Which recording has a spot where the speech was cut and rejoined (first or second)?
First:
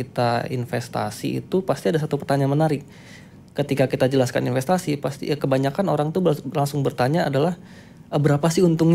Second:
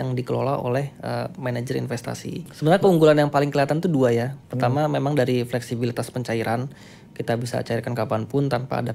second